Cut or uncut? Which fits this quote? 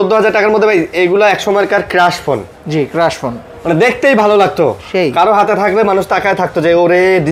uncut